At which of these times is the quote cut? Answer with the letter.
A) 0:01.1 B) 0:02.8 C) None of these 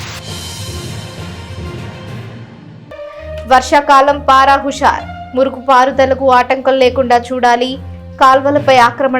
B